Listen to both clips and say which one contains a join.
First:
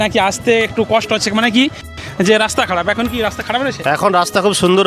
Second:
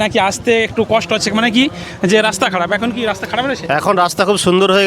second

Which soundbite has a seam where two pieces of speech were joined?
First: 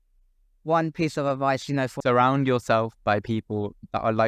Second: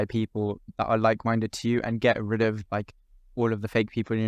first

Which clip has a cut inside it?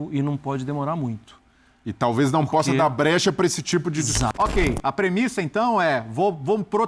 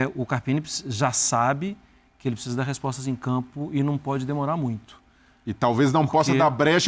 first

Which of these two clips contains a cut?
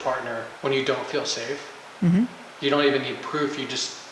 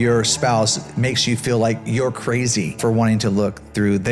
second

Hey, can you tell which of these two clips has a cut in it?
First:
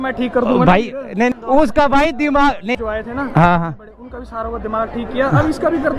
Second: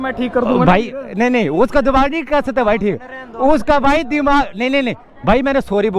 first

